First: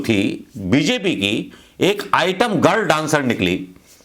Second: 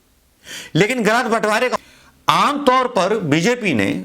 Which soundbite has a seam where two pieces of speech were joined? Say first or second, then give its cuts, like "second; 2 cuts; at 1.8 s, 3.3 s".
second; 1 cut; at 1.8 s